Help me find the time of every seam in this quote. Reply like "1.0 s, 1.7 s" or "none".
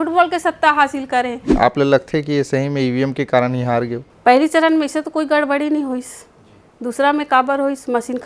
1.5 s, 4.0 s